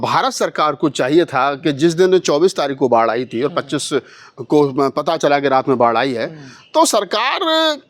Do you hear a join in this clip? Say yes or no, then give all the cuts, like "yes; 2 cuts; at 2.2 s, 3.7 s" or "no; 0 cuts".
no; 0 cuts